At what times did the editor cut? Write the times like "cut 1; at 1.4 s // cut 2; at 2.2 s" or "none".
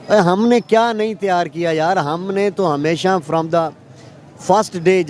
none